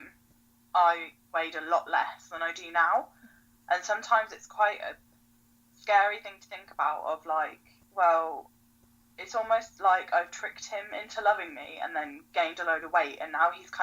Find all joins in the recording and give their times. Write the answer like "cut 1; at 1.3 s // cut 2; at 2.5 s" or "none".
none